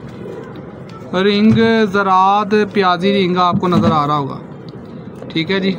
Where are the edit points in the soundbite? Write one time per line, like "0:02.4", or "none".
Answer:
none